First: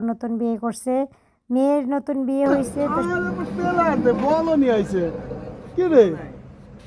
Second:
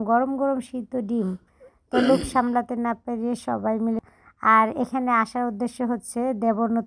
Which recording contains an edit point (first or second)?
second